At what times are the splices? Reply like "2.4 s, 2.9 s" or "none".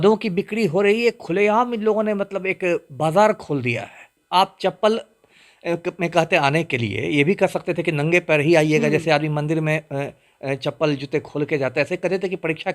4.1 s